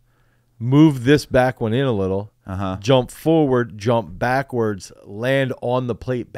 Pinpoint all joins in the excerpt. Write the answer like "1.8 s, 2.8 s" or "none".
none